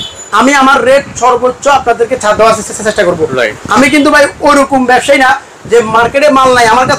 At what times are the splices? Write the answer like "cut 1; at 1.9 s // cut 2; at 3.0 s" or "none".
none

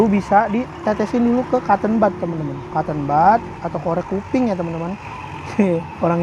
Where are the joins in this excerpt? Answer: none

